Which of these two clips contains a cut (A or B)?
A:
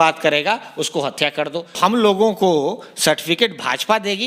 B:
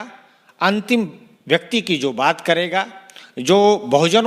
A